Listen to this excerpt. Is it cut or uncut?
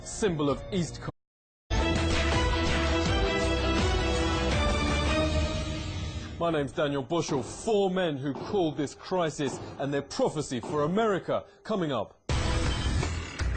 uncut